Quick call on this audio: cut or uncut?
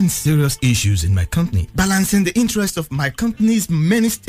uncut